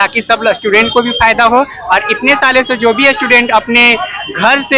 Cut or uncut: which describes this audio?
uncut